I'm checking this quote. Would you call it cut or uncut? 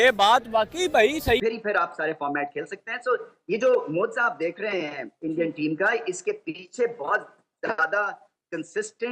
cut